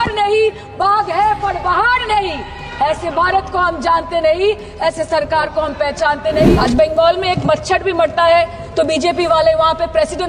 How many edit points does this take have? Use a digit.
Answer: 1